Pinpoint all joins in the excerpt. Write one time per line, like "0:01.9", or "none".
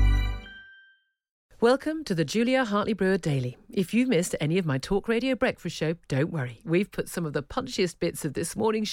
0:01.4